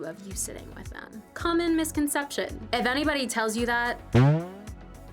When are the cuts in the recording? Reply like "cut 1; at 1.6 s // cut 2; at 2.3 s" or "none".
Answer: cut 1; at 2.6 s